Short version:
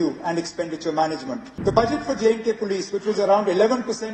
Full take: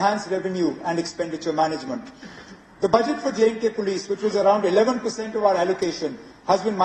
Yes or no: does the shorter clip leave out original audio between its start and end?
yes